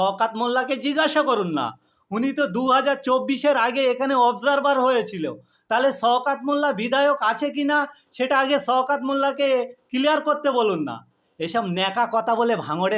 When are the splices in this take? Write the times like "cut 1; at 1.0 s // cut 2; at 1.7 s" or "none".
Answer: none